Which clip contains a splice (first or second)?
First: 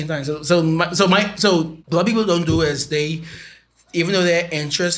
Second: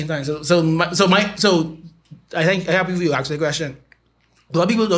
first